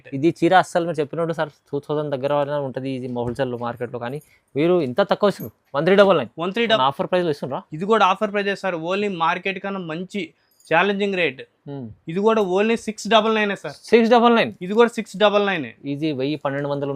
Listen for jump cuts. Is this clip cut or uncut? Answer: cut